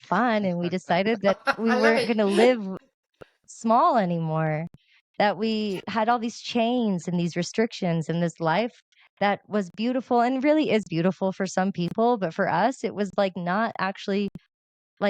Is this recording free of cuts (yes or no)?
yes